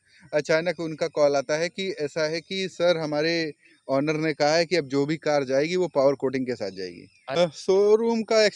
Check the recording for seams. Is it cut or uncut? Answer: cut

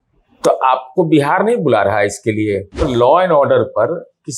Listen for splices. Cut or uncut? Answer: cut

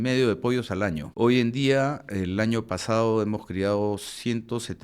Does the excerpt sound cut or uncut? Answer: cut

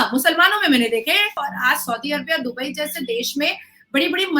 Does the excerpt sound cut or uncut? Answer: cut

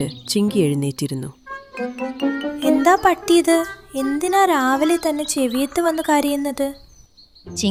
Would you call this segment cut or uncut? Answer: uncut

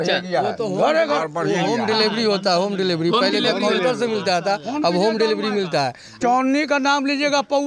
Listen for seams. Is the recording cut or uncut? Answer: cut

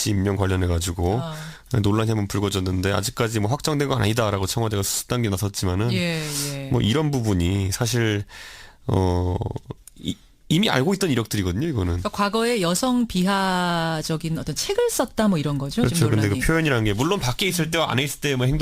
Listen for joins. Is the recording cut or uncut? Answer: cut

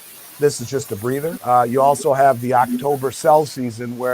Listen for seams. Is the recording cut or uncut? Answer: cut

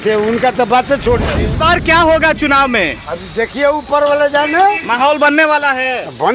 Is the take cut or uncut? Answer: cut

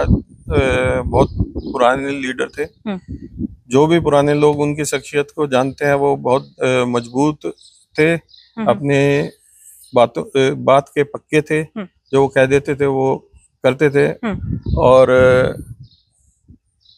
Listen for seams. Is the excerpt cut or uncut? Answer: uncut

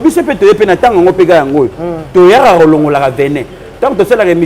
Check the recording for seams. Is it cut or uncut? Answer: uncut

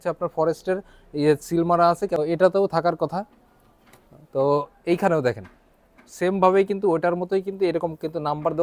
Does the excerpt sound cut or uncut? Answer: cut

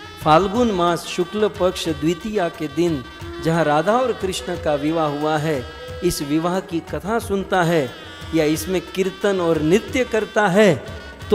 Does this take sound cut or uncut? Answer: uncut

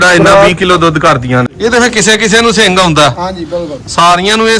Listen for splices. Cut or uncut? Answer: cut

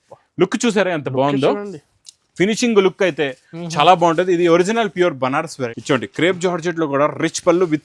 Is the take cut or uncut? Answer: cut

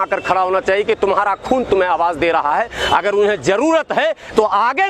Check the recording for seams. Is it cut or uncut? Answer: uncut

